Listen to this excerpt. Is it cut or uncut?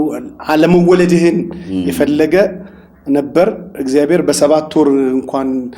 uncut